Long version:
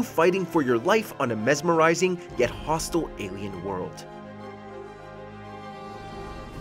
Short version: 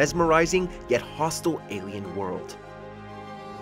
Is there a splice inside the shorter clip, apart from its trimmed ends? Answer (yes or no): yes